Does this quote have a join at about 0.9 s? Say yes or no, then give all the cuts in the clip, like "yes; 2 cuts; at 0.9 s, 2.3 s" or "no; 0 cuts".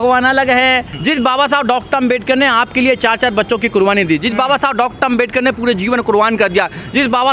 yes; 1 cut; at 0.9 s